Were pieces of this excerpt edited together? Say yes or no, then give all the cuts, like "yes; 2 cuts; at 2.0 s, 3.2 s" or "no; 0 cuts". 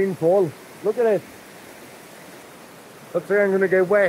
yes; 1 cut; at 2.4 s